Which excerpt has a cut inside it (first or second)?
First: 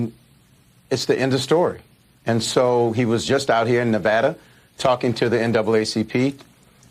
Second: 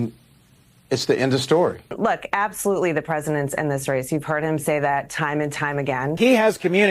second